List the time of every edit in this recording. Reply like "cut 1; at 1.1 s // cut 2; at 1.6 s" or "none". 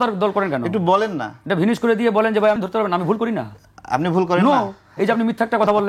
cut 1; at 2.6 s